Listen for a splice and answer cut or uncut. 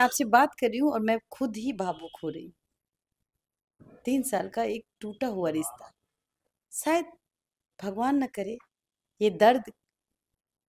uncut